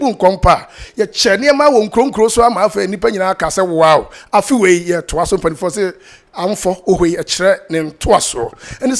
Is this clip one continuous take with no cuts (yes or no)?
yes